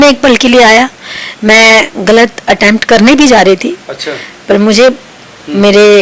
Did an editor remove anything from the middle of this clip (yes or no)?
no